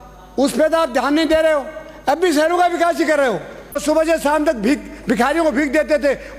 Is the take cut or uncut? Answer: cut